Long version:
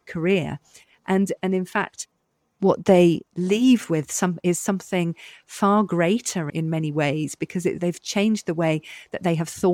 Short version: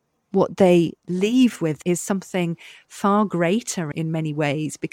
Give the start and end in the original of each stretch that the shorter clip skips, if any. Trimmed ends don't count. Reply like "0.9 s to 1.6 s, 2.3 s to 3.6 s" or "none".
4.1 s to 4.4 s

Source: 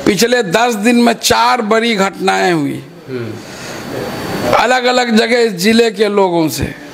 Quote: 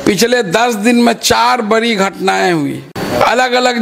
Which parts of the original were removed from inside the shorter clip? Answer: 2.9 s to 4.2 s

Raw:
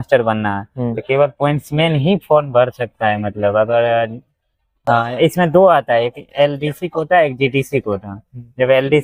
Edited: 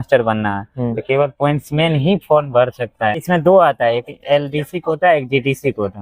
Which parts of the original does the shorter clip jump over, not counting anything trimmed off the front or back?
3.2 s to 5.3 s

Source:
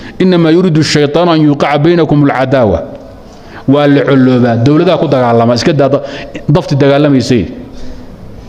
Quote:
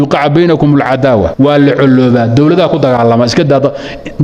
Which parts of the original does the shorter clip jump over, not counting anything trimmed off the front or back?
2.8 s to 3.6 s

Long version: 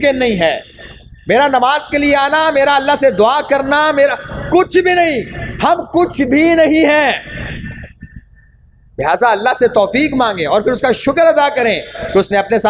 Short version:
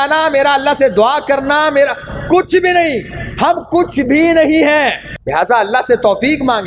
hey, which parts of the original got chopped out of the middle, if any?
7.3 s to 8.8 s

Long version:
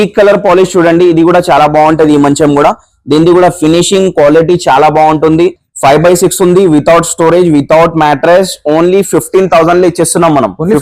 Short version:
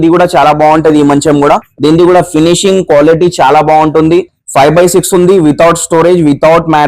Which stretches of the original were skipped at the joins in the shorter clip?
2.8 s to 3.0 s

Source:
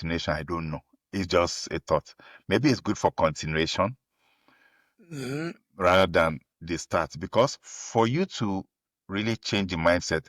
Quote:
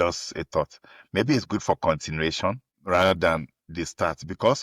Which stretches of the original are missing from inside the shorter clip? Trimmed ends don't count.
4.1 s to 5.6 s

